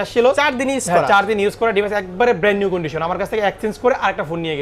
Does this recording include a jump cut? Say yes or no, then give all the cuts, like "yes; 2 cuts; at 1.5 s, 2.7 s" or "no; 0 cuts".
no; 0 cuts